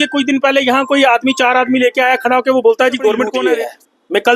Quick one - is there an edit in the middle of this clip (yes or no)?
yes